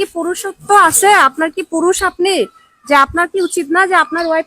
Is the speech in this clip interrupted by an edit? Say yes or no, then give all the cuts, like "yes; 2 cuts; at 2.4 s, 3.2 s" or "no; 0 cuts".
no; 0 cuts